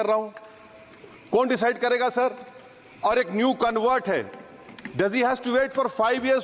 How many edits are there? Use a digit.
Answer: 0